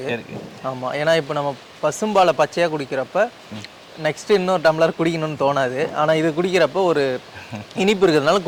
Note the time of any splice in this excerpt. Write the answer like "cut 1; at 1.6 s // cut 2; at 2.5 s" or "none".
none